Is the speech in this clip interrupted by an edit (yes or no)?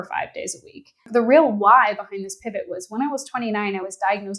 yes